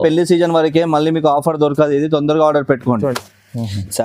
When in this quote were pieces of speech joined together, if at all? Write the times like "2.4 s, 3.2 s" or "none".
3.1 s